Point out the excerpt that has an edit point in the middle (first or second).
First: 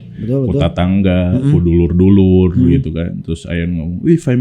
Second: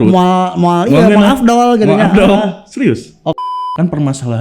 second